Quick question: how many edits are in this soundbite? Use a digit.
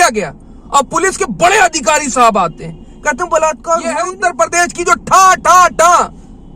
1